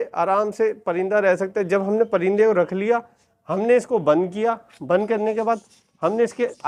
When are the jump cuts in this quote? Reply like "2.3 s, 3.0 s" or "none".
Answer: none